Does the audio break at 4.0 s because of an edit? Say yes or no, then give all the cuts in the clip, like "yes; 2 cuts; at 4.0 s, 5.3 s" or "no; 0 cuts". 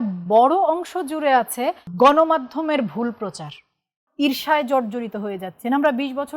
yes; 2 cuts; at 1.9 s, 4.0 s